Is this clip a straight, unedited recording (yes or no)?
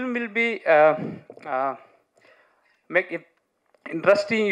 yes